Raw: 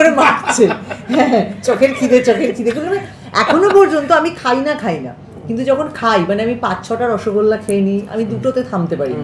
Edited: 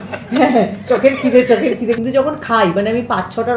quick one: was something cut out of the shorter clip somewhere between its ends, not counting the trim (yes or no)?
yes